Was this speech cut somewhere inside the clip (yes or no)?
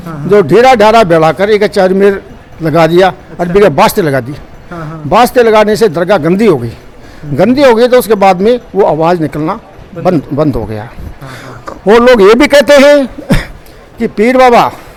no